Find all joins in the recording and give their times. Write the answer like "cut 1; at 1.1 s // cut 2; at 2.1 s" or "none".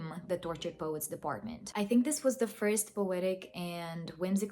cut 1; at 1.6 s